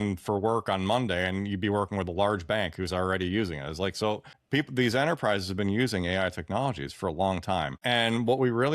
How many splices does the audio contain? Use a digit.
2